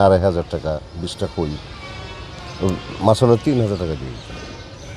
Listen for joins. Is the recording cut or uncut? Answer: uncut